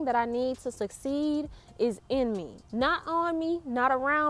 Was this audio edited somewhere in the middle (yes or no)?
no